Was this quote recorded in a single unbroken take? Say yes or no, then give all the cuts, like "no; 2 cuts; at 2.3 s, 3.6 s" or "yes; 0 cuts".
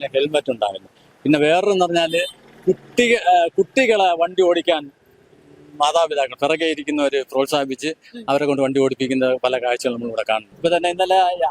no; 1 cut; at 10.5 s